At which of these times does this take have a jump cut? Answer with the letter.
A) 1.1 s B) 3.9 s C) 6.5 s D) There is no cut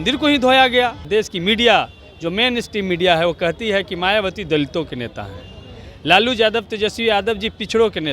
A